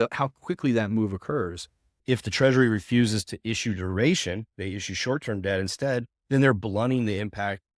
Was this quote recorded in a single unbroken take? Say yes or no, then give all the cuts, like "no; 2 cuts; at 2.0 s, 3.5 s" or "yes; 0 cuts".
no; 1 cut; at 2.0 s